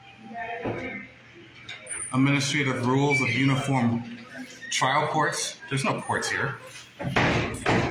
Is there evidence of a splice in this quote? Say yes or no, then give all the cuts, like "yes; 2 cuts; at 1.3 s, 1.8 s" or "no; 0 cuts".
no; 0 cuts